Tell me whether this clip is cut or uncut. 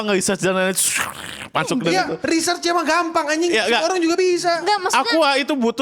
uncut